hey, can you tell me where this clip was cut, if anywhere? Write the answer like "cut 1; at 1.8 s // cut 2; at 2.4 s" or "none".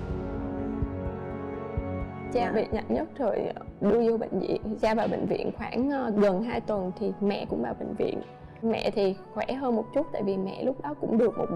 none